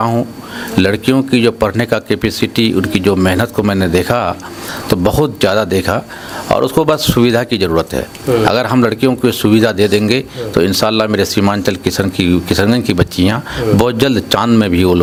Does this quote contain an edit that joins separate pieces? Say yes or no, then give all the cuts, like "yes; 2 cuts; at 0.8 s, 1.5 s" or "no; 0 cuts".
no; 0 cuts